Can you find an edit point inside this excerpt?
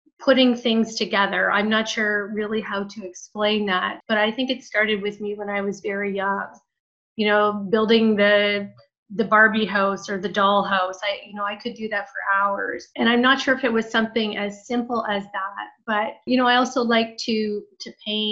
no; 0 cuts

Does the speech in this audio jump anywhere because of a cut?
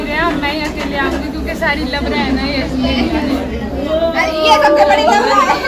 no; 0 cuts

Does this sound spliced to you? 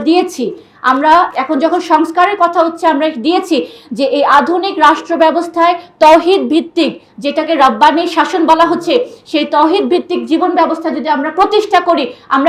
yes; 1 cut; at 1.3 s

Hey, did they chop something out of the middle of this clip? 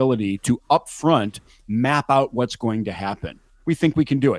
no; 0 cuts

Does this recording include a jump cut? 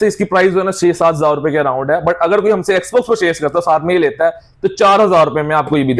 no; 0 cuts

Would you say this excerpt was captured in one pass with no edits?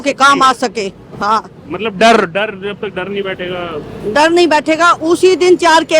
yes; 0 cuts

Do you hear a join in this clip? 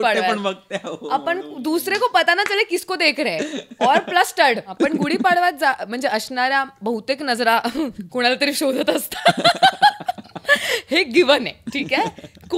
yes; 1 cut; at 4.7 s

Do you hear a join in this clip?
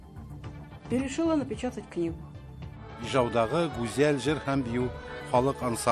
yes; 1 cut; at 0.9 s

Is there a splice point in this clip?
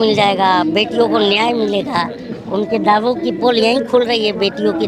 no; 0 cuts

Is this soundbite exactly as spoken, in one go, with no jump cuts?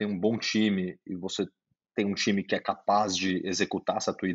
yes; 0 cuts

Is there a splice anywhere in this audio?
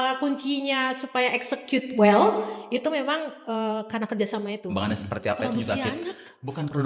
yes; 1 cut; at 4.7 s

